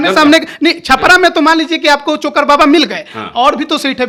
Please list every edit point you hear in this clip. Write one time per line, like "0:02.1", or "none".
none